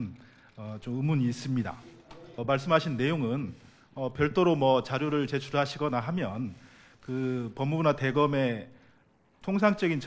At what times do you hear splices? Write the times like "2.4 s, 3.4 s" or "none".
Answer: 2.4 s